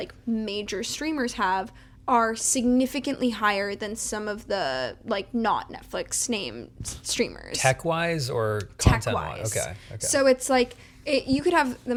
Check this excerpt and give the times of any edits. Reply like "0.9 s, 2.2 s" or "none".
none